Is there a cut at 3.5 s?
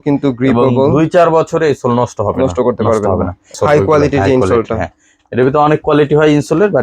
yes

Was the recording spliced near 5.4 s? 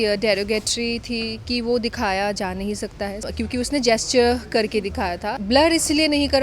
yes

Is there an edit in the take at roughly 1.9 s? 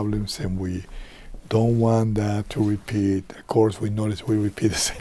no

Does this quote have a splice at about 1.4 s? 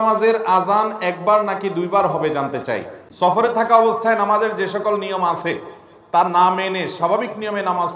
no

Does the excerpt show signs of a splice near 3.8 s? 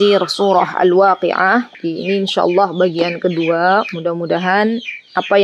no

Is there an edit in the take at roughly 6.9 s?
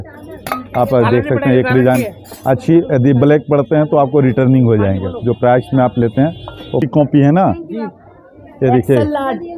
yes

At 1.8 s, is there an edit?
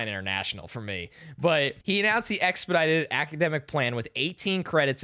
yes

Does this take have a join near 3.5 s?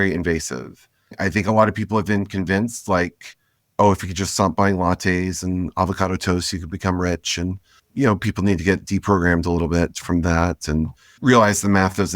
no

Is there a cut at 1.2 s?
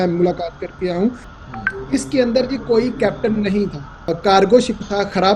yes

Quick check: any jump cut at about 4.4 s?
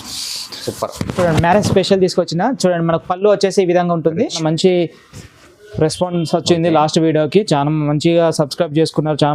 yes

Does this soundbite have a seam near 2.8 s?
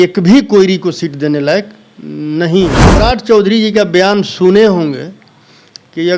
yes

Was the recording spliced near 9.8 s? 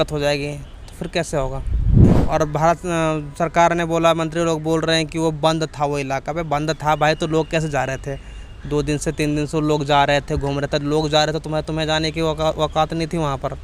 no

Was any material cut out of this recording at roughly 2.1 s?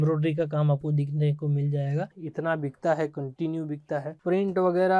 yes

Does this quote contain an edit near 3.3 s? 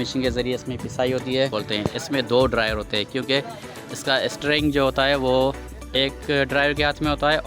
no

